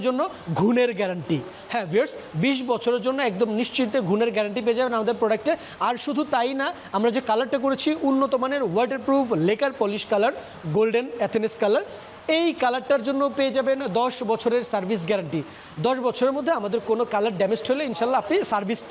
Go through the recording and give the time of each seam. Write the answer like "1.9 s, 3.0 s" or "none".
none